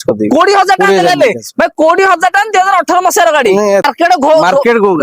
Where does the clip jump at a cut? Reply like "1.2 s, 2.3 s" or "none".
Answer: 3.8 s